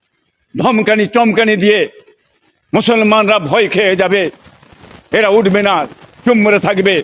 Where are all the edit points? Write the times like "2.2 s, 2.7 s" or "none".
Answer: none